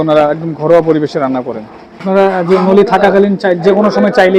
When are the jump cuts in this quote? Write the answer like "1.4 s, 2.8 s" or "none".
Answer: 2.0 s